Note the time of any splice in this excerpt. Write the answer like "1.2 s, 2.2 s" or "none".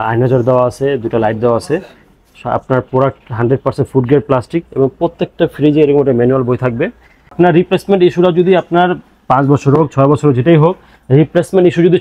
7.3 s